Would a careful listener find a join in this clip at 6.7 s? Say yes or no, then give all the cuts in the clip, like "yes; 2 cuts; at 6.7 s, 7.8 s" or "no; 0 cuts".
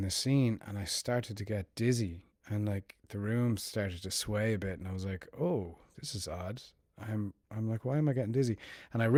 no; 0 cuts